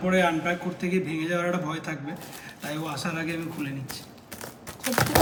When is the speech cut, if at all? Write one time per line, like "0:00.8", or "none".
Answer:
none